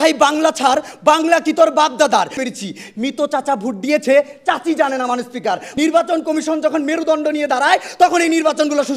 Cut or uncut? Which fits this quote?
cut